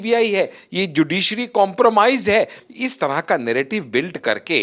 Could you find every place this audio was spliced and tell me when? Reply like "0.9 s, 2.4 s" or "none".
2.6 s